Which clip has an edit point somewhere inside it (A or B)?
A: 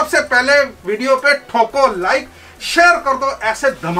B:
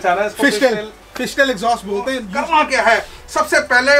B